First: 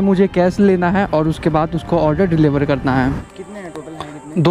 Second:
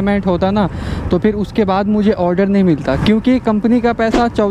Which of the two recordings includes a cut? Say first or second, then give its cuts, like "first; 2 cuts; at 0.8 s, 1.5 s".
first; 1 cut; at 3.3 s